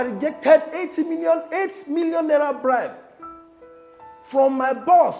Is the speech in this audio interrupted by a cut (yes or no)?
yes